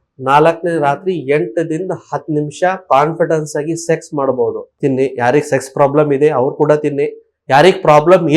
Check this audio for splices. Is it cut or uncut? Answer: cut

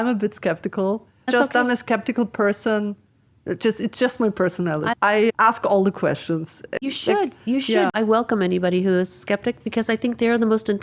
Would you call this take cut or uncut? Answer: cut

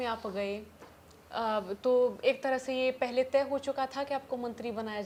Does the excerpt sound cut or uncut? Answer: uncut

